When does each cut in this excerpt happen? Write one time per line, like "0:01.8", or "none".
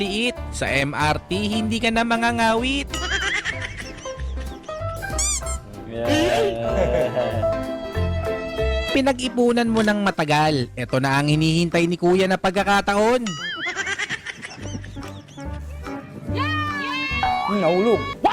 0:08.9